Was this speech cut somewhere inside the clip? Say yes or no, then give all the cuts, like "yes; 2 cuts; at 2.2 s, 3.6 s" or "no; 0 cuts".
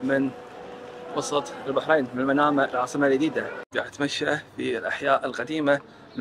yes; 1 cut; at 3.6 s